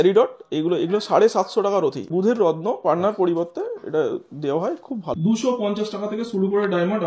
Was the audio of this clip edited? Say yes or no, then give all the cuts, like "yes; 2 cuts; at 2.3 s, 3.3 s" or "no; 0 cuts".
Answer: yes; 2 cuts; at 2.1 s, 5.1 s